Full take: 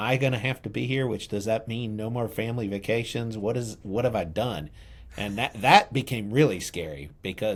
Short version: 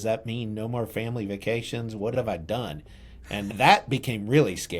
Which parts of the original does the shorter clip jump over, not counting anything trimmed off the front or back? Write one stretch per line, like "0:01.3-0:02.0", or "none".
0:03.6-0:04.0
0:05.4-0:05.5